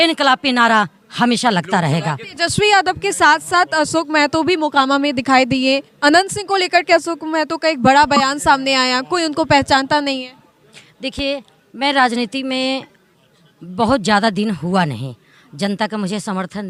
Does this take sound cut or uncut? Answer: uncut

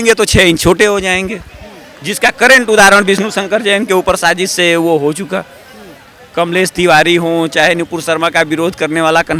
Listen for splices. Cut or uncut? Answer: uncut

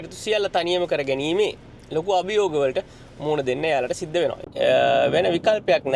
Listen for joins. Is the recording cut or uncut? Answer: cut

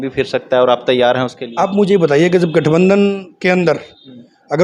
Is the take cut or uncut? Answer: uncut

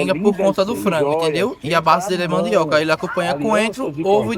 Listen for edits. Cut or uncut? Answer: uncut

